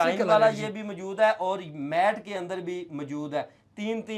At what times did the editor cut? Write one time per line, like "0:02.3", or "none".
none